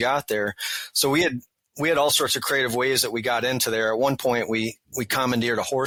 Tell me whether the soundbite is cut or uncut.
uncut